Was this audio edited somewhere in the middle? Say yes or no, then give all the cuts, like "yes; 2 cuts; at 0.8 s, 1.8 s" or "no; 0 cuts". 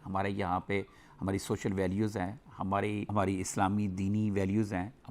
no; 0 cuts